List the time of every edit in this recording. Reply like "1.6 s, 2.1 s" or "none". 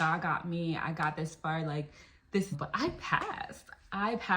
2.6 s